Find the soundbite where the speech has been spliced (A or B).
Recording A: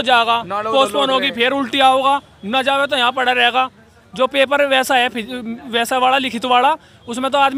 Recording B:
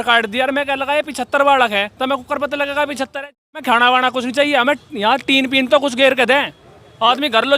B